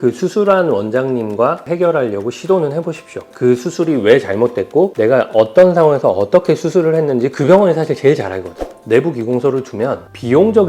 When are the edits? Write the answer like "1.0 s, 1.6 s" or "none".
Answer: 1.7 s, 3.3 s, 8.7 s